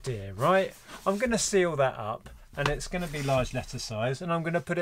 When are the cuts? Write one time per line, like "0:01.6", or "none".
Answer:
none